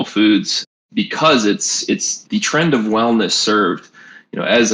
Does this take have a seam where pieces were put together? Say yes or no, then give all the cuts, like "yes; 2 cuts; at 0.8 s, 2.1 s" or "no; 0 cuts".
yes; 1 cut; at 2.1 s